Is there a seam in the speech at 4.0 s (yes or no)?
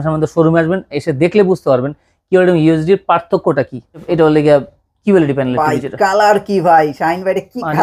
yes